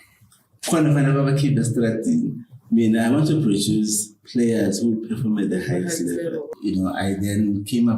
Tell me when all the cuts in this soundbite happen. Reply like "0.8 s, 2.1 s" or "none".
6.5 s